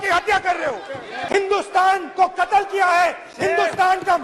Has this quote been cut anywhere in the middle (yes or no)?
yes